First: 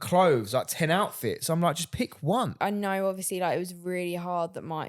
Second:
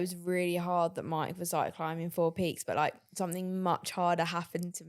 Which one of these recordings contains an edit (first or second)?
first